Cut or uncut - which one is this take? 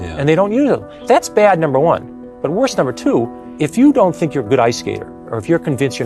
cut